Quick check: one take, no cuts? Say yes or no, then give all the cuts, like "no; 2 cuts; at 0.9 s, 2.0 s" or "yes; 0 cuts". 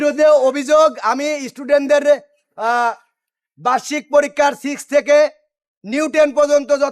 yes; 0 cuts